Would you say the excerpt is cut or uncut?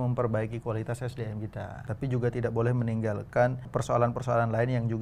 cut